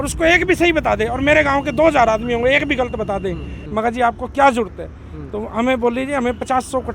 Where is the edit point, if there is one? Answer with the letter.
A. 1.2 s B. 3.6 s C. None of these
B